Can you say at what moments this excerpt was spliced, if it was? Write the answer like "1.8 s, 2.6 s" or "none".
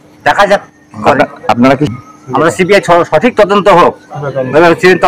1.9 s